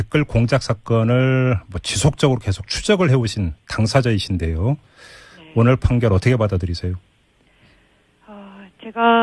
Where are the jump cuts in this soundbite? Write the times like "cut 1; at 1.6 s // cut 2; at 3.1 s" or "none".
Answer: cut 1; at 4.6 s